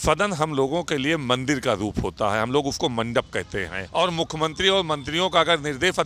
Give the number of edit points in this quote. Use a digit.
1